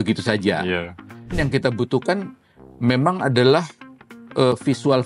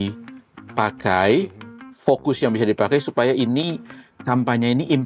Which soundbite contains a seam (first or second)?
first